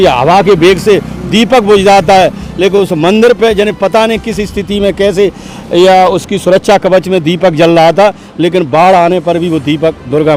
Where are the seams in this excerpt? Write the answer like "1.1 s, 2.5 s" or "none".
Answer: none